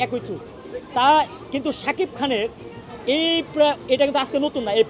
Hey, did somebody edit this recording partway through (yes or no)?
no